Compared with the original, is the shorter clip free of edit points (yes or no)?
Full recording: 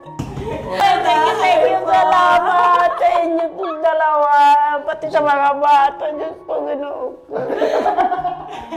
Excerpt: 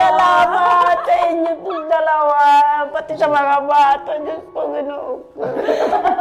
yes